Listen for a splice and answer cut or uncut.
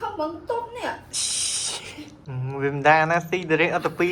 cut